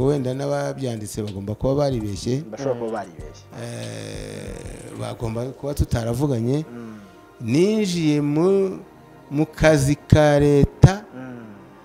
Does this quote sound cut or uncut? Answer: uncut